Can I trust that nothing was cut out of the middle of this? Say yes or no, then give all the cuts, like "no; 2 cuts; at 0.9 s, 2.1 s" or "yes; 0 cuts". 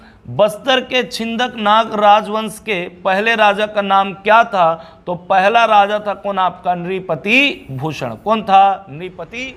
yes; 0 cuts